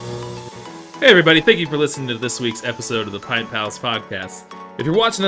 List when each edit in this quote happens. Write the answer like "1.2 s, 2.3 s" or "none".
0.9 s